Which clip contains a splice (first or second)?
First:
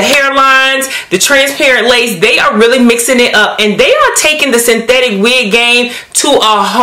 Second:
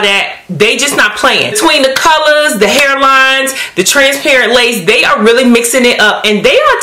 second